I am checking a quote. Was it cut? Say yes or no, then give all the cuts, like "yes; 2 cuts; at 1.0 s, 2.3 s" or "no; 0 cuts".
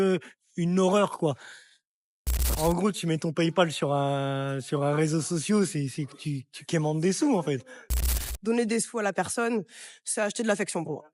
yes; 2 cuts; at 2.5 s, 8.3 s